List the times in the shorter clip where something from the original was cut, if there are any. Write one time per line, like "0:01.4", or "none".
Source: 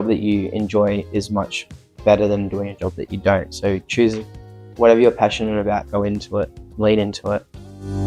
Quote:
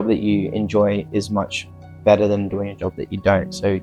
none